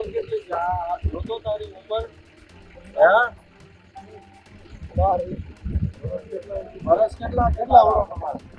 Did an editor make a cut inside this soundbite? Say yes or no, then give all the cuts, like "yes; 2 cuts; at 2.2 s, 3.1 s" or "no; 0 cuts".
no; 0 cuts